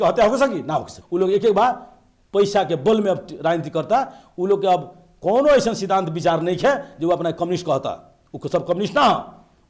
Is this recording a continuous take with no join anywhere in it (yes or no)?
no